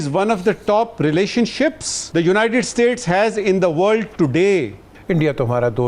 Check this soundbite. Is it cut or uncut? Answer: cut